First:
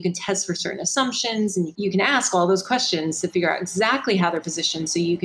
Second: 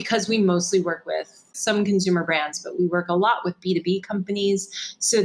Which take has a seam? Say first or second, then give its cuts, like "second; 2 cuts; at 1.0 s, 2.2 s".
first; 1 cut; at 1.7 s